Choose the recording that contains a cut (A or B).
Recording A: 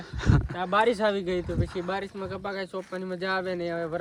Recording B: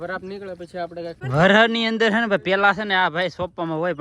B